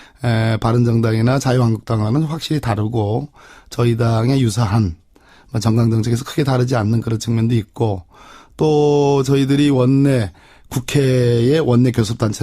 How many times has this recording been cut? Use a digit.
1